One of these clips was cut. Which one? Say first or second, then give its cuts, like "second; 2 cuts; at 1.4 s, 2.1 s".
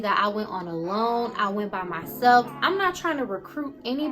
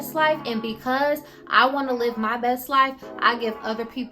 first; 1 cut; at 2.5 s